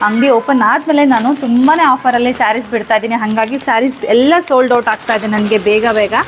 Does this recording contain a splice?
no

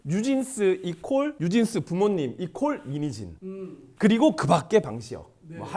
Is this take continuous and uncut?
yes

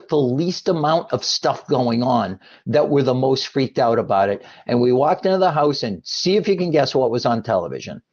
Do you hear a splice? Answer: no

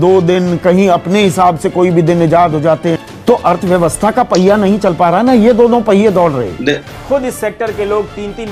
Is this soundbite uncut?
no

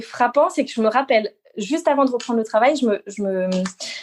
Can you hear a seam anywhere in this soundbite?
no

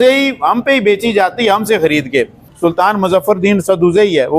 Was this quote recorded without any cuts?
no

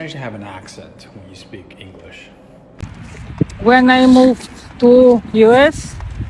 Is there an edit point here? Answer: yes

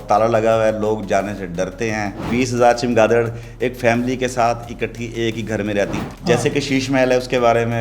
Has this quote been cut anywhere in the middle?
yes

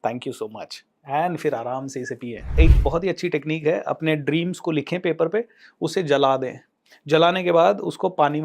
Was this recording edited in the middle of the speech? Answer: yes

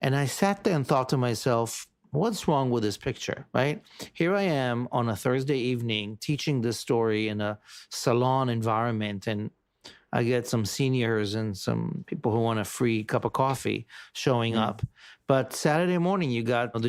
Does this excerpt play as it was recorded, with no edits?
yes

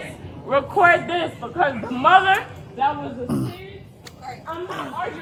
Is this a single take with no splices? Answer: yes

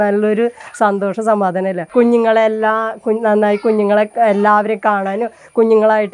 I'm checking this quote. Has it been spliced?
yes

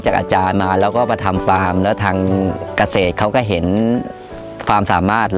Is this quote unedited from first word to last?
yes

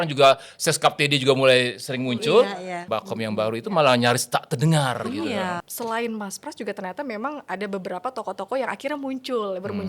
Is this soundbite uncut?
no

